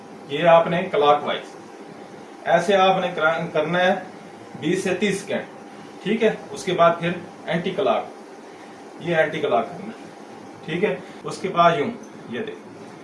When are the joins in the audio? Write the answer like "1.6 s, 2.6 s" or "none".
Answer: 11.1 s